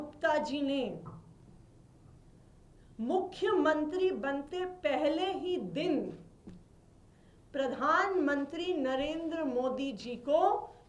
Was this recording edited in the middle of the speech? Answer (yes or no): no